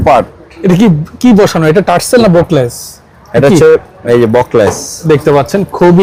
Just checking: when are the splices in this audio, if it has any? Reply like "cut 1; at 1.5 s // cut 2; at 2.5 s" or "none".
none